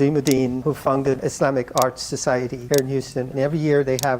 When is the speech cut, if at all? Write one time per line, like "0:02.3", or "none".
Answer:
none